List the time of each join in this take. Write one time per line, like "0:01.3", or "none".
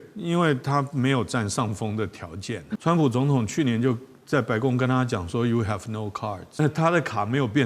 0:02.7
0:06.6